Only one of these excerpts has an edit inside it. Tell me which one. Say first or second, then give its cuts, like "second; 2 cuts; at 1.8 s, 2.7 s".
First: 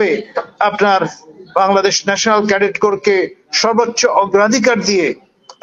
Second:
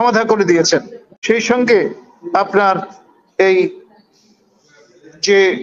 second; 1 cut; at 1.0 s